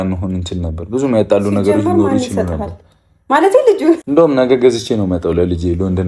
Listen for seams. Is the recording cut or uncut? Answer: cut